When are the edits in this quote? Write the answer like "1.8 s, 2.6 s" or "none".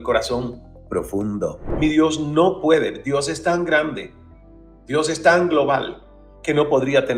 1.6 s